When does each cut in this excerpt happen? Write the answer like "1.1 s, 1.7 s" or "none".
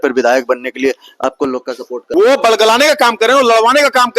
1.9 s